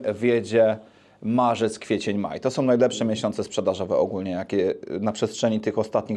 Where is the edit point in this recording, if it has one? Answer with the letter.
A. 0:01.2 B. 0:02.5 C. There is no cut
C